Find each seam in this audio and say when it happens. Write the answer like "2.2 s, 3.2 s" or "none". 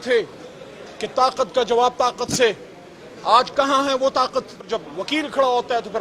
4.8 s